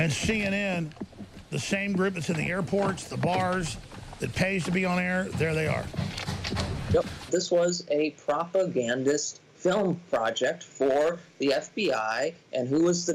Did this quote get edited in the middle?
yes; 1 cut; at 7.3 s

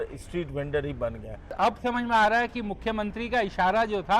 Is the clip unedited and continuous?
no; 1 cut; at 1.5 s

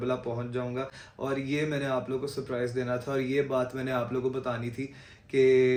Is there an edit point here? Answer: no; 0 cuts

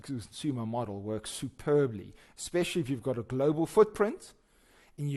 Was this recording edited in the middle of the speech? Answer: no; 0 cuts

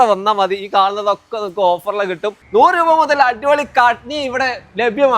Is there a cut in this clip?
yes; 1 cut; at 2.4 s

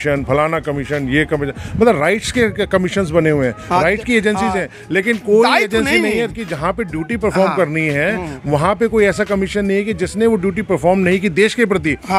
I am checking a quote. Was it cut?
no; 0 cuts

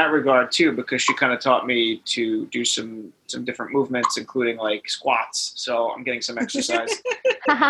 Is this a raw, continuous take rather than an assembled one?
yes; 0 cuts

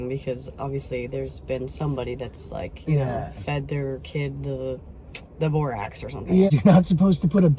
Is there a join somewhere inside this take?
yes; 1 cut; at 6.5 s

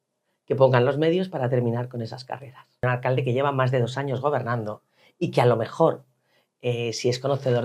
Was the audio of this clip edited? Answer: yes; 1 cut; at 2.8 s

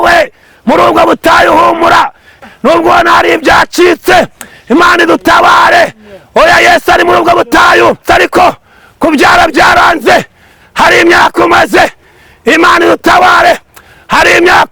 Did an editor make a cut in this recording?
yes; 2 cuts; at 2.3 s, 8.0 s

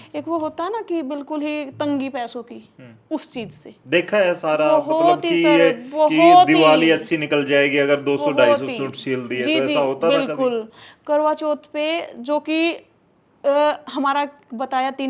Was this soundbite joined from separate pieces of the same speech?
no; 0 cuts

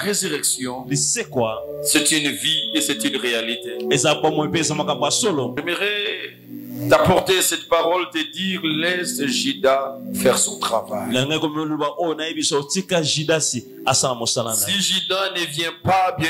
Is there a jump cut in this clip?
yes; 1 cut; at 5.6 s

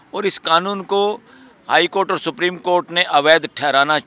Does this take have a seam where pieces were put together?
no; 0 cuts

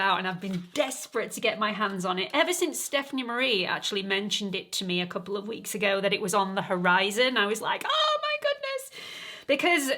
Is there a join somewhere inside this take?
no; 0 cuts

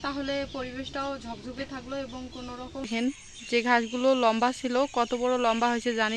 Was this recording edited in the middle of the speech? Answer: yes; 1 cut; at 2.9 s

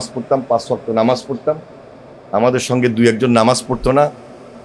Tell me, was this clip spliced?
no; 0 cuts

